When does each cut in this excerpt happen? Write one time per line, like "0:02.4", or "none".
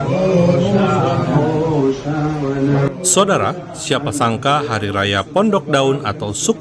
none